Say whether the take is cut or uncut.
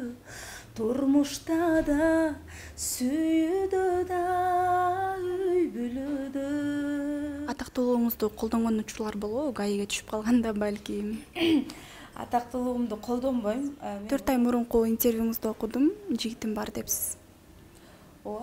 cut